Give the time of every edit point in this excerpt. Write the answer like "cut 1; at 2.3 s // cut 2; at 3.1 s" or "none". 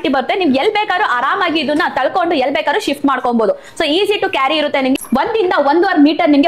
cut 1; at 5.0 s